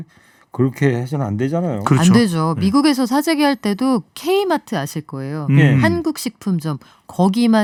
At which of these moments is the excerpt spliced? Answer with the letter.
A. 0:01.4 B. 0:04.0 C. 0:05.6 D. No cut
D